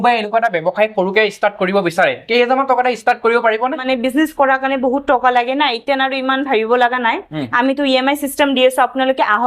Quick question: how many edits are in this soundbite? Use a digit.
1